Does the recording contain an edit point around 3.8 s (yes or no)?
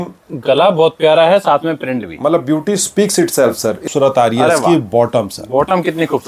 yes